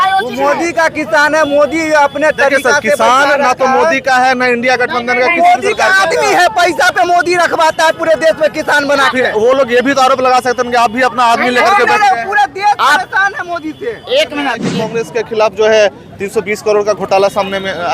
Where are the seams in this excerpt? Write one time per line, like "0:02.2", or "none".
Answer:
0:14.8